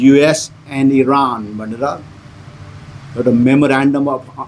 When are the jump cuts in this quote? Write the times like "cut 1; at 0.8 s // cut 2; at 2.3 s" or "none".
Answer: none